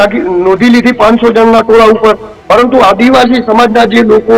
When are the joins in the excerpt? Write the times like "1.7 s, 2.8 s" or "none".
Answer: 2.3 s